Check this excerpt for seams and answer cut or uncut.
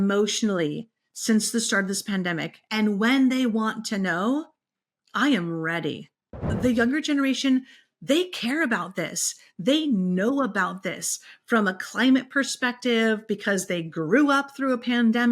cut